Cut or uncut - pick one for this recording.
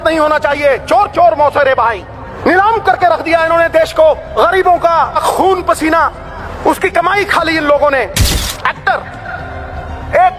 cut